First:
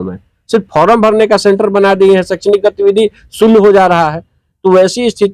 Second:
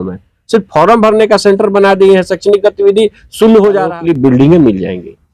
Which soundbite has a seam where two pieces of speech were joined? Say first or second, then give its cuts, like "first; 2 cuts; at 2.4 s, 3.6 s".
second; 1 cut; at 3.9 s